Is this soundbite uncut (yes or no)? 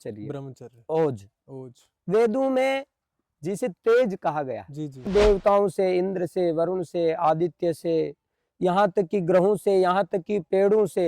no